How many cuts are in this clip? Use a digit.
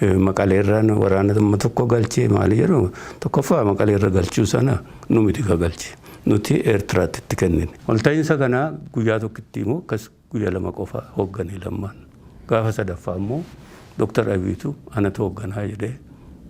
1